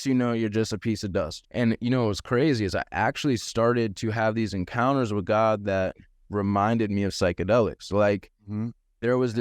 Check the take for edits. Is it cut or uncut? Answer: cut